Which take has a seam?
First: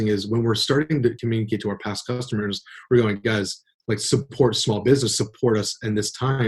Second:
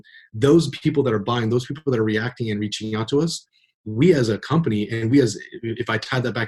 first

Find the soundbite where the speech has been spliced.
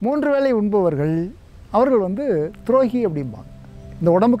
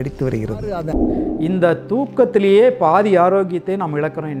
second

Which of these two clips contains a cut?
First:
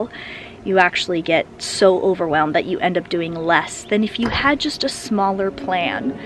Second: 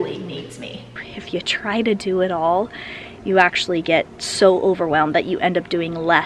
second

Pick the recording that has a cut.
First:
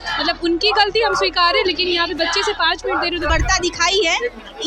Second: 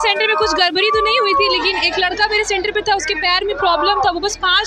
first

